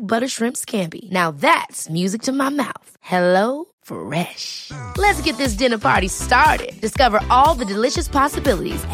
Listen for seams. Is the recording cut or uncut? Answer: uncut